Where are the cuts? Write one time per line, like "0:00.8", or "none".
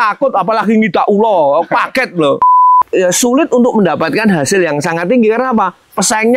0:02.7